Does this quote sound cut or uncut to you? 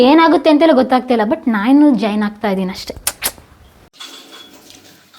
cut